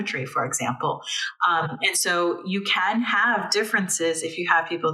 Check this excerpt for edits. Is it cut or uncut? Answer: uncut